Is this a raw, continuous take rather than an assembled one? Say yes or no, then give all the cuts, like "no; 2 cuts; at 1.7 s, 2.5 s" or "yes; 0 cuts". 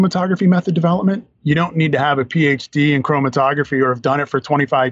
yes; 0 cuts